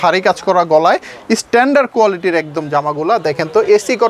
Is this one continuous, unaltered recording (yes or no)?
yes